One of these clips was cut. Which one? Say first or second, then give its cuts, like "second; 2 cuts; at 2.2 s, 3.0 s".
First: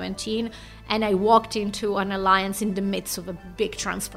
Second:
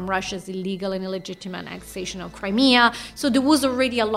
second; 1 cut; at 2.4 s